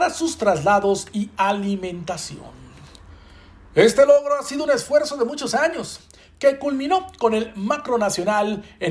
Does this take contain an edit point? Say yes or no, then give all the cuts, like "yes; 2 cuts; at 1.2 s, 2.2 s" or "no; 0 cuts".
yes; 1 cut; at 3.1 s